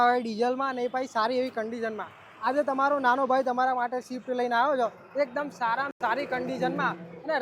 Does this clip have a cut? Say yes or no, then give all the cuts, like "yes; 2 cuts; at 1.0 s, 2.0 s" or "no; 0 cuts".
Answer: no; 0 cuts